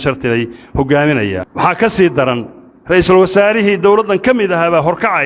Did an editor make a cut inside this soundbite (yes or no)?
yes